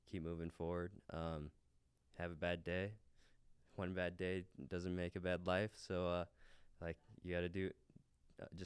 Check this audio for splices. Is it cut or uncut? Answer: uncut